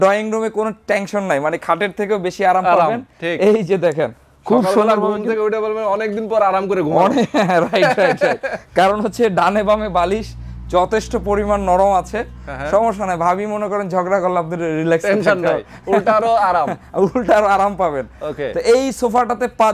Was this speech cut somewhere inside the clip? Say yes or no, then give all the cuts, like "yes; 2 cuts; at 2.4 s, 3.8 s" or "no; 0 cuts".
no; 0 cuts